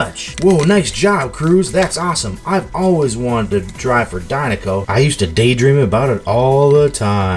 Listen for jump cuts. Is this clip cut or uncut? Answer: uncut